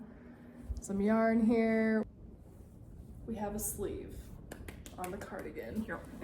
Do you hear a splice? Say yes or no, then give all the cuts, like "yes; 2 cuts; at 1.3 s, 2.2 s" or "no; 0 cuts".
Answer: yes; 1 cut; at 2.1 s